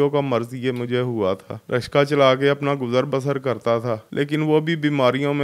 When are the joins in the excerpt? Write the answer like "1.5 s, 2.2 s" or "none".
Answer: 1.5 s, 4.1 s